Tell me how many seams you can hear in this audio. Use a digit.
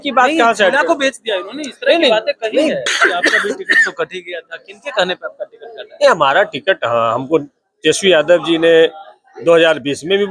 1